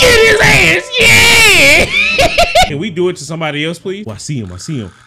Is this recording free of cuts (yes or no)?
no